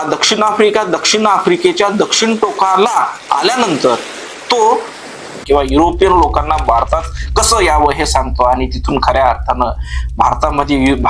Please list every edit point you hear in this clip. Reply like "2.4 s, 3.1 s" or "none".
5.4 s